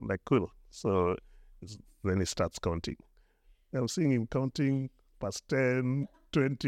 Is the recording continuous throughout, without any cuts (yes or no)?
yes